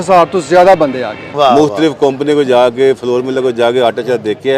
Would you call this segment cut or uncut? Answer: cut